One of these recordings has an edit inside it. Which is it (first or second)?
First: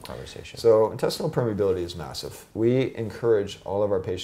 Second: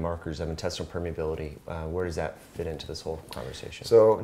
first